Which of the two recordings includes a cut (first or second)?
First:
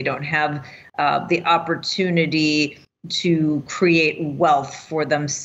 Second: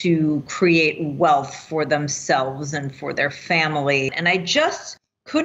second